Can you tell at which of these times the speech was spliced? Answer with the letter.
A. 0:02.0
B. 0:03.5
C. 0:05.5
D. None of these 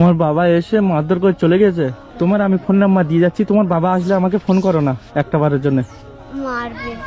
A